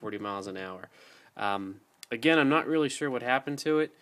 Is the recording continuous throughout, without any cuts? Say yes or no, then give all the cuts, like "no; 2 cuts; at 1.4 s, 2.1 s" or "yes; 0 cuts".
yes; 0 cuts